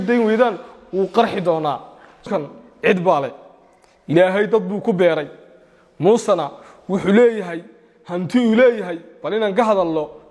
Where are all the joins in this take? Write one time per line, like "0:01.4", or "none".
0:02.3